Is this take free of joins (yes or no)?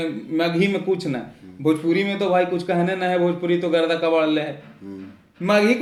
yes